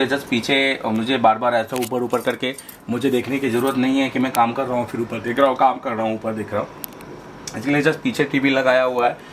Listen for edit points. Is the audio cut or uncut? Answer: uncut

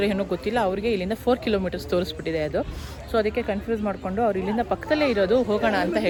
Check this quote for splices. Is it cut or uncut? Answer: uncut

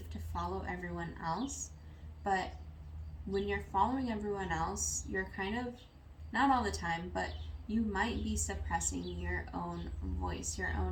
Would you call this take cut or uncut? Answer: uncut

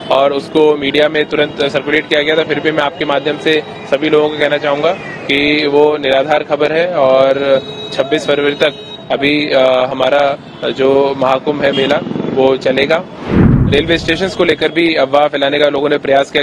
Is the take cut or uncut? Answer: cut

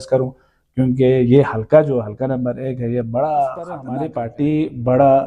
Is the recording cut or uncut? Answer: cut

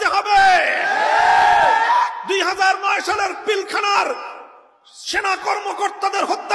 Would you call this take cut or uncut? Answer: uncut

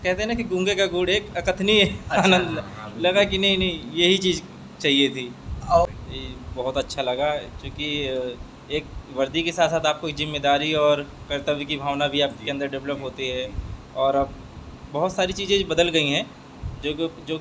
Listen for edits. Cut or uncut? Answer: cut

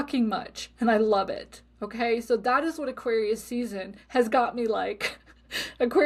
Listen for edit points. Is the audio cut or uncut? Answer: uncut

